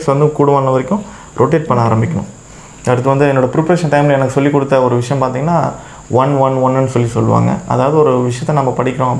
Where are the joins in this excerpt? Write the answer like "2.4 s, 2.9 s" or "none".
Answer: none